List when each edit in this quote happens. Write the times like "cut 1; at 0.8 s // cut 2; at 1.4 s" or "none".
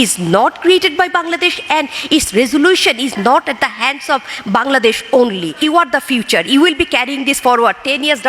cut 1; at 3.1 s // cut 2; at 5.5 s